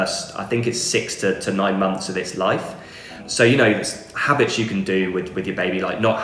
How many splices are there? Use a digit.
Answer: 1